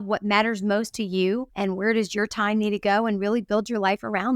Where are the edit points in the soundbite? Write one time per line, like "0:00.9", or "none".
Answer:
0:01.5